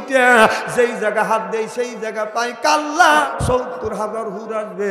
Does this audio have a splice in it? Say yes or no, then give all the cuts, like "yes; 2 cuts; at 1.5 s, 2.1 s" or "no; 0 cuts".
yes; 1 cut; at 3.2 s